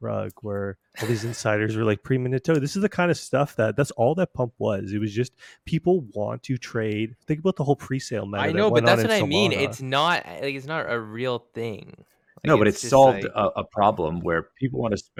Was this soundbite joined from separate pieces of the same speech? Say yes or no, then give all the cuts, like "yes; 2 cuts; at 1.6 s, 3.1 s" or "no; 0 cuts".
no; 0 cuts